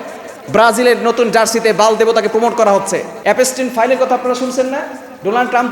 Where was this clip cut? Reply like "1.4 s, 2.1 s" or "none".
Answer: 3.1 s